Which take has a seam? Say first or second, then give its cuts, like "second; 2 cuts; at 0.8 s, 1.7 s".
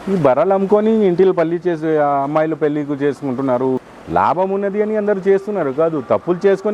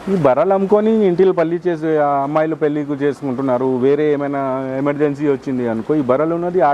first; 1 cut; at 3.8 s